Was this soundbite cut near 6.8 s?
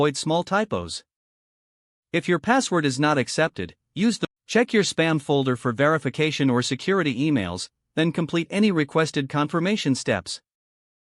no; 1 cut; at 4.2 s

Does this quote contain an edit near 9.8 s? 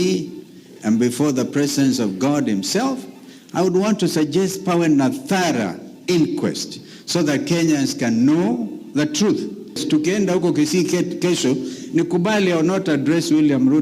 yes; 1 cut; at 9.8 s

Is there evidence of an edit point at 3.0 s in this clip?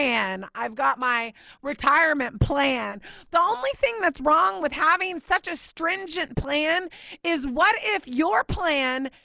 yes; 1 cut; at 3.0 s

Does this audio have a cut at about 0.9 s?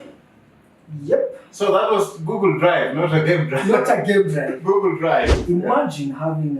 no; 1 cut; at 5.4 s

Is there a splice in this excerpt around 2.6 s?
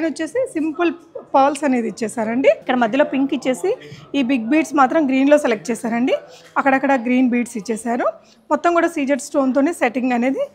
yes; 1 cut; at 2.6 s

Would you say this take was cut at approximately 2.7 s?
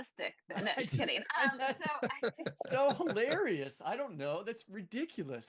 no; 0 cuts

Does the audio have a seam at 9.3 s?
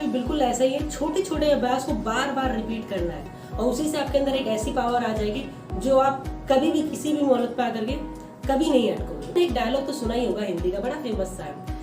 yes; 1 cut; at 9.3 s

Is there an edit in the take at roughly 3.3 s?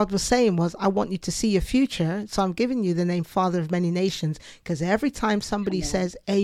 no; 0 cuts

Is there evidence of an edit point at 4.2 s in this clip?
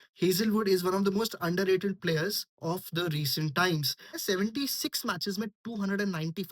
yes; 1 cut; at 4.2 s

